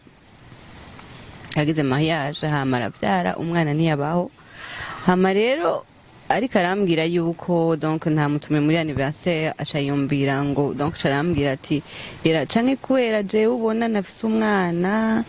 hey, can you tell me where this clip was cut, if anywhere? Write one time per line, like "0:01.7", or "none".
none